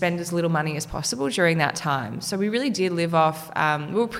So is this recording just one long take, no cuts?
yes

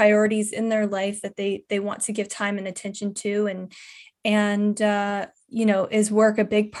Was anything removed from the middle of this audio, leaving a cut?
no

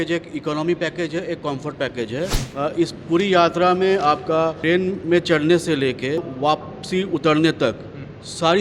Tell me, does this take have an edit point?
yes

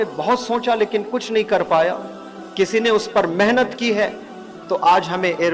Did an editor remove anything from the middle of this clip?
no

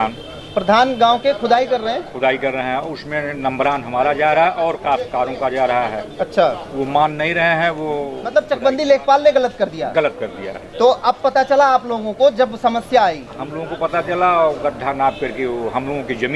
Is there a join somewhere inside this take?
yes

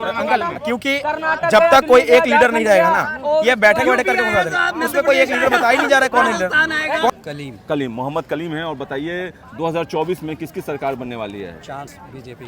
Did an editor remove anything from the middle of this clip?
yes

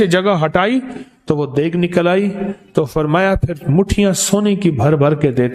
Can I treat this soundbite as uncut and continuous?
yes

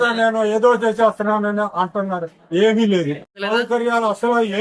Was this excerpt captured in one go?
no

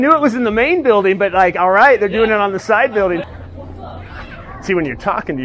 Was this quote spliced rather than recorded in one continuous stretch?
yes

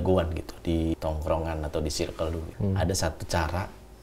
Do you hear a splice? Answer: yes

